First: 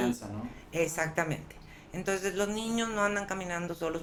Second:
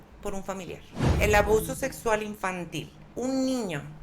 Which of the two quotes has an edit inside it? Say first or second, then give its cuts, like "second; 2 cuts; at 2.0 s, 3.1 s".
second; 2 cuts; at 1.1 s, 3.0 s